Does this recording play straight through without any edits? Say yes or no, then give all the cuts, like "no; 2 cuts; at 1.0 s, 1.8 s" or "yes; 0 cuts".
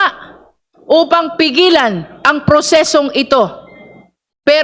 yes; 0 cuts